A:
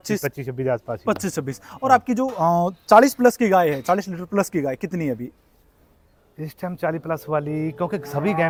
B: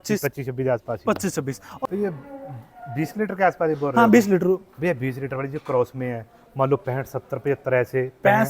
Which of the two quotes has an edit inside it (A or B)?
B